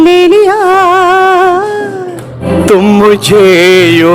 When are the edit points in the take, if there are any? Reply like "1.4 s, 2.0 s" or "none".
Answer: 2.4 s